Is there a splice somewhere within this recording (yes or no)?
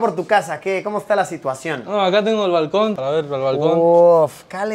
no